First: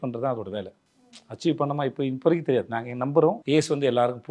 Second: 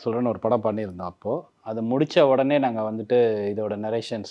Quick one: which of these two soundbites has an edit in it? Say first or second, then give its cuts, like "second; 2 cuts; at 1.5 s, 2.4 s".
first; 1 cut; at 3.4 s